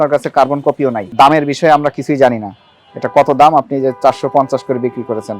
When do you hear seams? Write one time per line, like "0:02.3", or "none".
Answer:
0:01.1